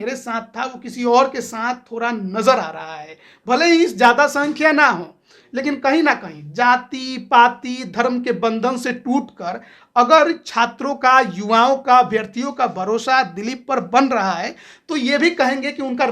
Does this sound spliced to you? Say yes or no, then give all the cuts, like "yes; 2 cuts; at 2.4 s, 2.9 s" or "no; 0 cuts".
no; 0 cuts